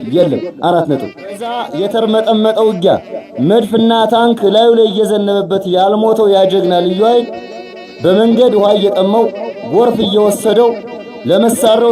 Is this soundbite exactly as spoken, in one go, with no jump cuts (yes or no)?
no